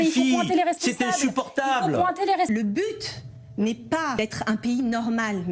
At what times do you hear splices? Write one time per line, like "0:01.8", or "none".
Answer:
0:02.5
0:04.2